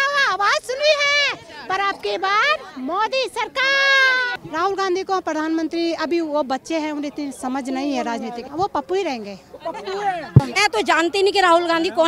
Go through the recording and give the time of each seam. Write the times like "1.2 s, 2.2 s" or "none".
4.3 s, 8.4 s, 10.6 s